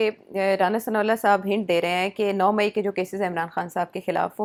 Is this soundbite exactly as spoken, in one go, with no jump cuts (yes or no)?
yes